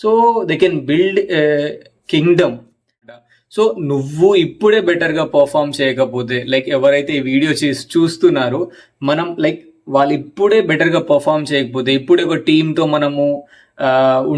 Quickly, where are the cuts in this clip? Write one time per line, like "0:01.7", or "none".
0:03.2